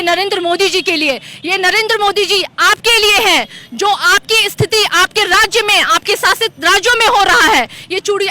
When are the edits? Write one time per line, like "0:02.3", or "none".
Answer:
none